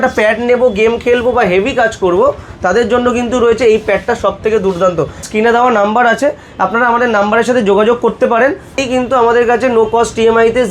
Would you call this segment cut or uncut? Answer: cut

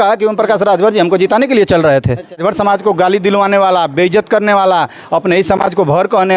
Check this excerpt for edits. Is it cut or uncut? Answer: cut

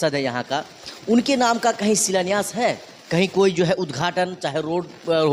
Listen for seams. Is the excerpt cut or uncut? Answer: uncut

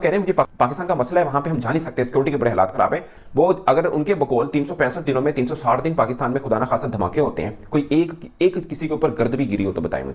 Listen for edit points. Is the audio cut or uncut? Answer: uncut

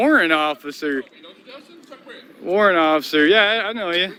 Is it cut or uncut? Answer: uncut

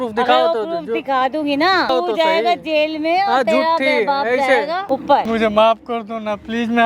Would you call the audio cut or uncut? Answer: cut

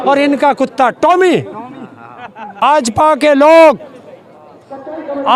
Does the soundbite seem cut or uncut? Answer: cut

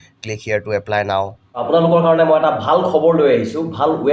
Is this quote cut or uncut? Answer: cut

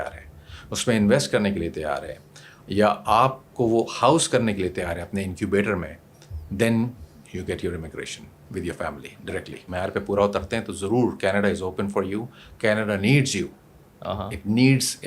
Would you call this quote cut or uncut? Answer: cut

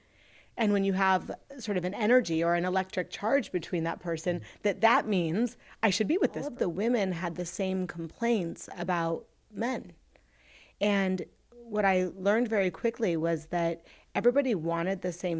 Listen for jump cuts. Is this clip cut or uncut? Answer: cut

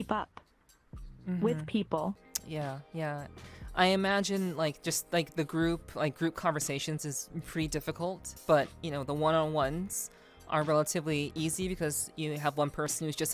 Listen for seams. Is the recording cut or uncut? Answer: cut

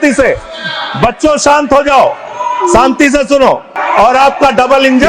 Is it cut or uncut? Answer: cut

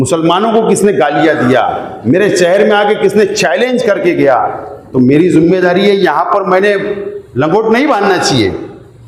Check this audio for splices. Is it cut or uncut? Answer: uncut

